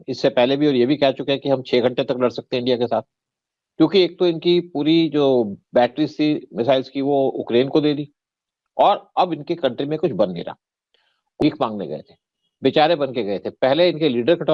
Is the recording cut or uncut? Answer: cut